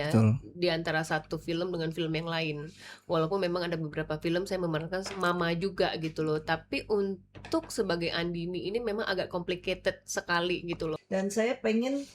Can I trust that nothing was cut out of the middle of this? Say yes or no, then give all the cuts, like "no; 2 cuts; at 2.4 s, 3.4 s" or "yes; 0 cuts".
no; 1 cut; at 10.9 s